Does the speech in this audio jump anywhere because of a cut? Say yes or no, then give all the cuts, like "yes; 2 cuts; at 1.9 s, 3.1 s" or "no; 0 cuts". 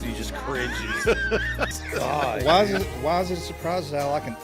yes; 1 cut; at 1.8 s